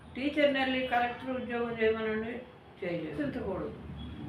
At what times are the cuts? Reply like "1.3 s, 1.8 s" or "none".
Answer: 3.2 s